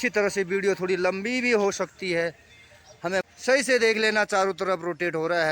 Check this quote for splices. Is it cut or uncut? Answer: cut